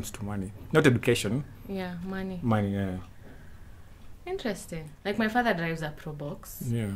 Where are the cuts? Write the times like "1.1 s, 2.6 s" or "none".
4.9 s